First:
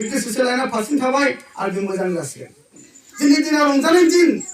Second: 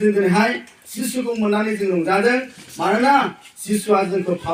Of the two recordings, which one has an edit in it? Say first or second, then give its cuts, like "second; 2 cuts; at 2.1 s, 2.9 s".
first; 1 cut; at 2.9 s